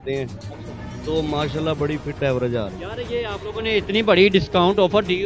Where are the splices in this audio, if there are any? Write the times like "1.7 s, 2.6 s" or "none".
2.8 s

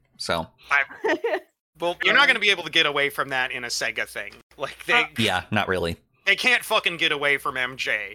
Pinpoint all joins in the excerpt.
2.0 s, 6.2 s

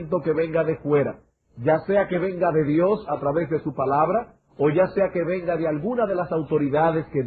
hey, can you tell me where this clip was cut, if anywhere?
none

